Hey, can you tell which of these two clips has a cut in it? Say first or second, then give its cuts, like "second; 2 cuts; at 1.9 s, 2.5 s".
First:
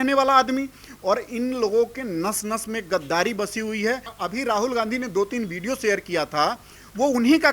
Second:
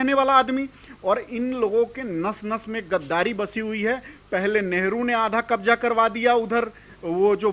first; 1 cut; at 4.1 s